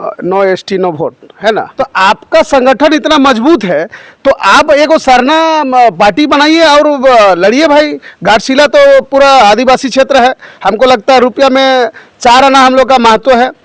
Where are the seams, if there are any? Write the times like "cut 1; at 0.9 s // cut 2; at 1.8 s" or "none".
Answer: cut 1; at 1.7 s